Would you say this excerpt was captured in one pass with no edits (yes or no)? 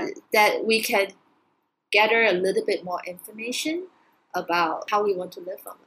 no